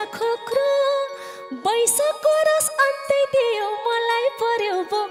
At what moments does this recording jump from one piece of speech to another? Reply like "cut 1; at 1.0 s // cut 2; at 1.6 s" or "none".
none